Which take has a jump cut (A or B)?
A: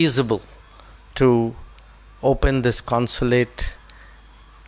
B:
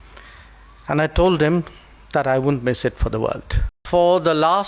B